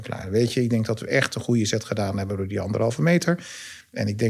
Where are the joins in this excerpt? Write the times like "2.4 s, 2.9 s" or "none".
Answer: none